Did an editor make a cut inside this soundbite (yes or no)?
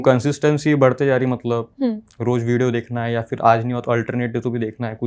no